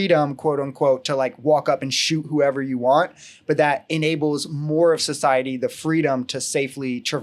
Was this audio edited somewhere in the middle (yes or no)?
no